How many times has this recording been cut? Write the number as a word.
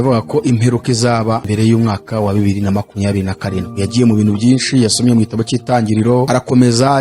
two